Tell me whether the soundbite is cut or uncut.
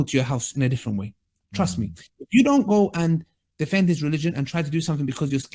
uncut